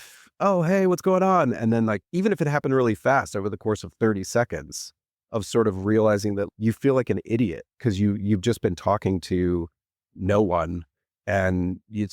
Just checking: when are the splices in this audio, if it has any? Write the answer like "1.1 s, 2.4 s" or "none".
2.0 s, 6.5 s